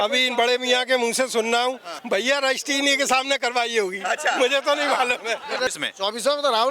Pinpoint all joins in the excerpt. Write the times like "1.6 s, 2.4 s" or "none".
1.9 s, 5.7 s